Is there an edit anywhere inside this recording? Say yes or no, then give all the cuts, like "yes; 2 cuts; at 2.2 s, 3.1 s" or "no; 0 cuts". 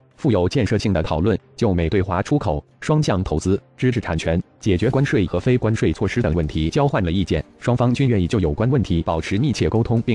yes; 1 cut; at 5.1 s